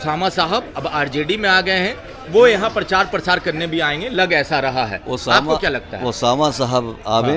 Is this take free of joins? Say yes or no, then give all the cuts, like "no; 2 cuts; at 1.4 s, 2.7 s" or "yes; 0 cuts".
yes; 0 cuts